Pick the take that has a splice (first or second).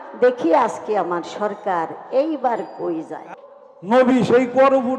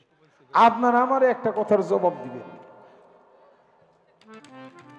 first